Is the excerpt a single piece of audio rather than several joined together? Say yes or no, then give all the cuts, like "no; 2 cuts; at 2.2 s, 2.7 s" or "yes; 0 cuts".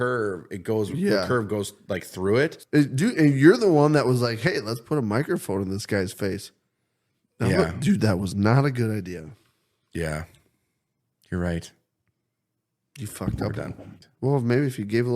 no; 2 cuts; at 2.6 s, 14.0 s